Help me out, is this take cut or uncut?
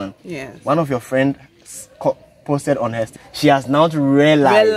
cut